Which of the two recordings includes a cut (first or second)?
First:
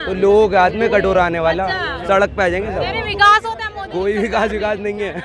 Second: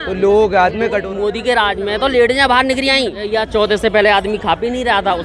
second